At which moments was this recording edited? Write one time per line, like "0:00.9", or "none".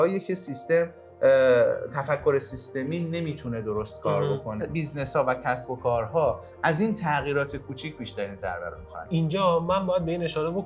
0:04.6
0:09.1